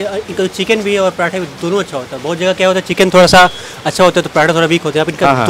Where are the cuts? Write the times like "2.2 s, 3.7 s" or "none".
none